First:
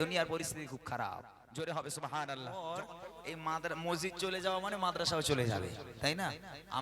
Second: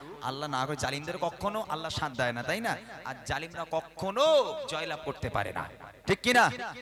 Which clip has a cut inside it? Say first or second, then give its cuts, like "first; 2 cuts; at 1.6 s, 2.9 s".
first; 1 cut; at 2.6 s